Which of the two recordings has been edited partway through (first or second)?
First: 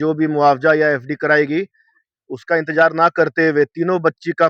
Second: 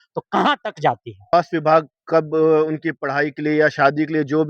second